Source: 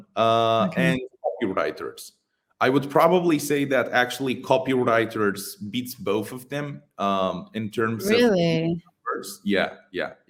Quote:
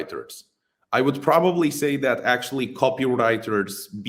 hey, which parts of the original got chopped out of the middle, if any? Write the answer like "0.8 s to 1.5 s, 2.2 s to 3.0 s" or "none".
none